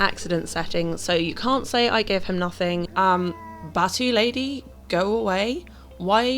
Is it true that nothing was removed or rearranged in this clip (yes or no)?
no